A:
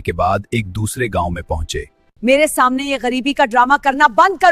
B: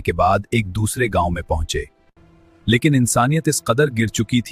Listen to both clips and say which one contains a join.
A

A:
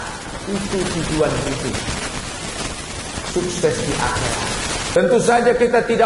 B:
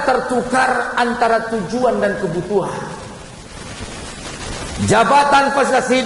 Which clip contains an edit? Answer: A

